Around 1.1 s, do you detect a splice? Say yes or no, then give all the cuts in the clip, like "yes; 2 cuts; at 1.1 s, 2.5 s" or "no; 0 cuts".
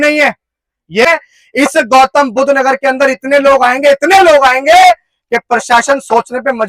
yes; 1 cut; at 1.1 s